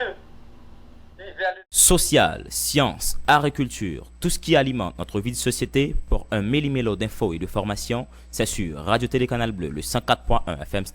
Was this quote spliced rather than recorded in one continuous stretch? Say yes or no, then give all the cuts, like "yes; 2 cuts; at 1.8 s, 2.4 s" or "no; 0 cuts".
yes; 1 cut; at 1.7 s